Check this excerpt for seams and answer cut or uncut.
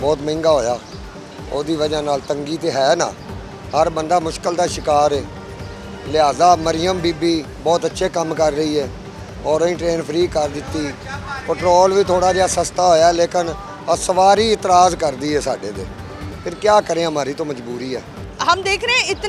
uncut